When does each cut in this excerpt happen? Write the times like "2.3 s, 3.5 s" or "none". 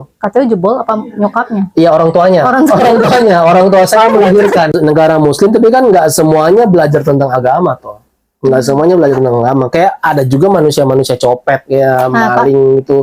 4.7 s